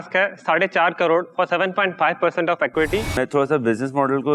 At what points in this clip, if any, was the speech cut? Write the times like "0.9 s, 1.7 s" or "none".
none